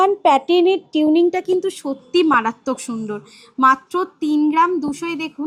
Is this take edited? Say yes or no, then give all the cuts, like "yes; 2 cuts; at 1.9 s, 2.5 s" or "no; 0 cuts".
no; 0 cuts